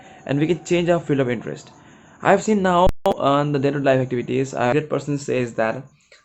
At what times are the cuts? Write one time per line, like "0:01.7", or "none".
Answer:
0:04.7